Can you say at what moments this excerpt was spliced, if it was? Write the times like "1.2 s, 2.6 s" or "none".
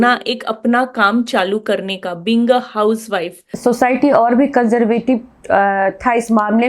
3.5 s